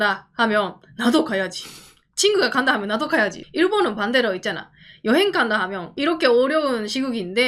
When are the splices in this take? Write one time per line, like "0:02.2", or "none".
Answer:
0:03.4
0:05.9